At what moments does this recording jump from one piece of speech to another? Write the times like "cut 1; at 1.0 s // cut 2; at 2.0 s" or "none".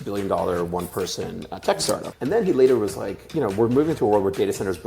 cut 1; at 2.1 s